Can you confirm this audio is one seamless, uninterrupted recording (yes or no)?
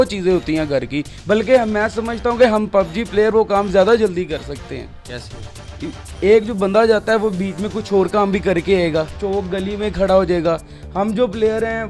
yes